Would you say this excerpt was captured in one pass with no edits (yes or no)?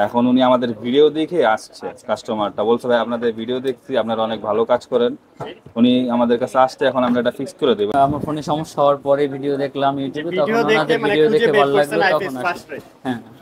no